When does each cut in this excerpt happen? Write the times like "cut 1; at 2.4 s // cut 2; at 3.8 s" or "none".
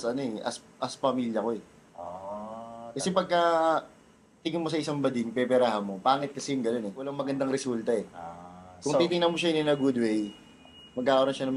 cut 1; at 7.1 s